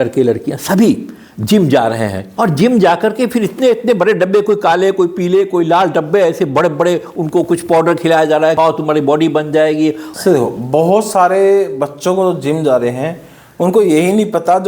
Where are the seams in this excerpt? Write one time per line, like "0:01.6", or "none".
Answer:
0:02.2
0:08.5
0:10.1